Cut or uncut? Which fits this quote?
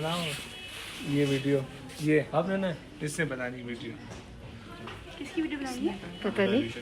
uncut